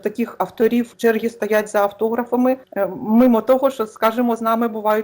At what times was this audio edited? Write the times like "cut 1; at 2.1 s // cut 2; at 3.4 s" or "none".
cut 1; at 0.9 s